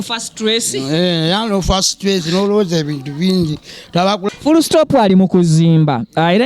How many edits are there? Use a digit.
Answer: 1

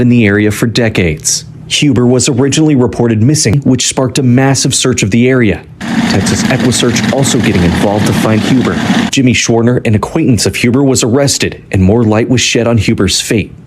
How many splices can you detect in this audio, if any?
2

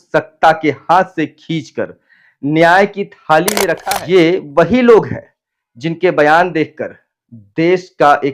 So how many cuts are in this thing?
1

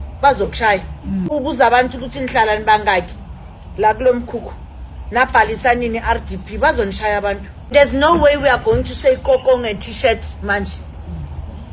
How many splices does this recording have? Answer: 2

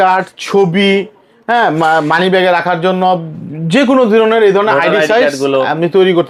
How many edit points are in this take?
0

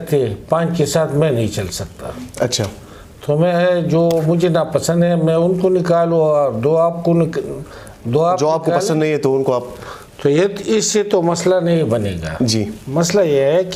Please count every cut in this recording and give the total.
0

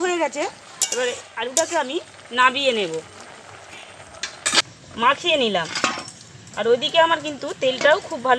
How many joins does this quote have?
1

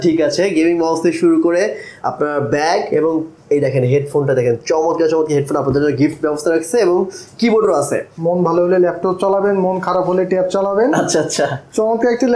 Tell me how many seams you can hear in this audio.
1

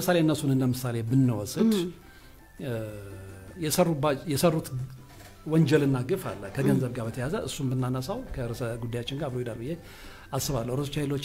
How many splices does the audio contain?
0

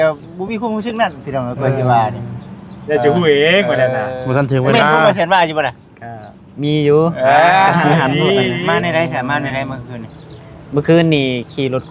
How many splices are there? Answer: 1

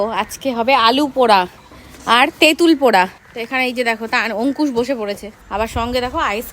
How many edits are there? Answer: 2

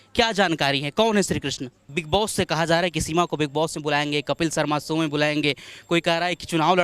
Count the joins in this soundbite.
1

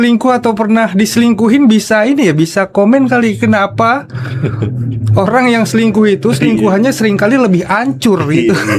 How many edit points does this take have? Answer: 0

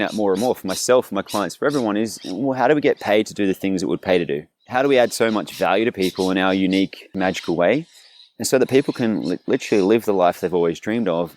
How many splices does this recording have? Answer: 2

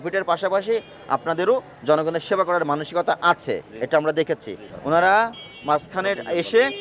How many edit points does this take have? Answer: 1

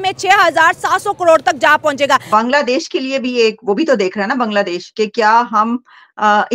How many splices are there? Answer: 1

